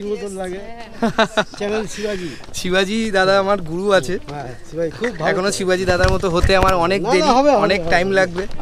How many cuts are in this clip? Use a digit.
0